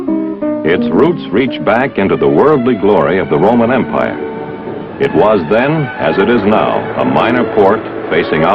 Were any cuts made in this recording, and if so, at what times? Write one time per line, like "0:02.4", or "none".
none